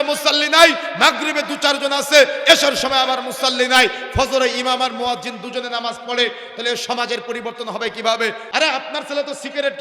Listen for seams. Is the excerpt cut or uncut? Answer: cut